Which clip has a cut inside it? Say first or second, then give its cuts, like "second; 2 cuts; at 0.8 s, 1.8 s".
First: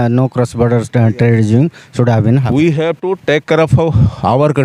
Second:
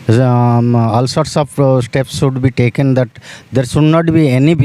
first; 1 cut; at 2.5 s